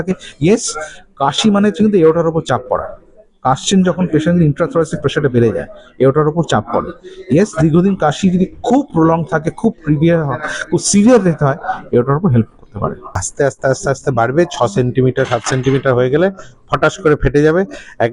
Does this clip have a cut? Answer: yes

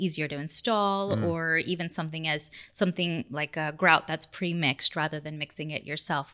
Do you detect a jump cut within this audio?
no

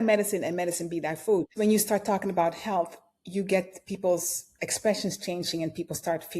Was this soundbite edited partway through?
yes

